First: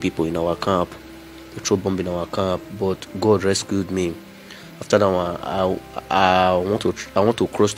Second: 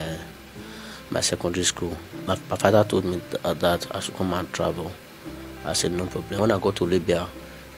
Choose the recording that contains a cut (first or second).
second